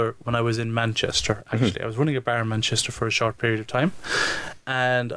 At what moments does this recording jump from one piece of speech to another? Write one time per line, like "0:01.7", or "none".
none